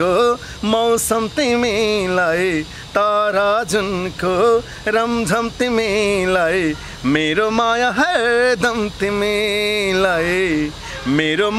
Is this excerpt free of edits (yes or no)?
yes